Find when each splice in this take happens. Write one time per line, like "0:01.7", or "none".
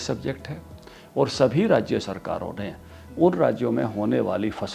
none